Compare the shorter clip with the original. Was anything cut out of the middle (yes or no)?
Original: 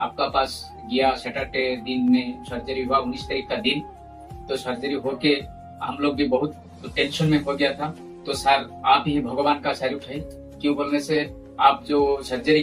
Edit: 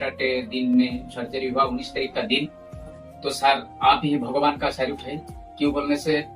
yes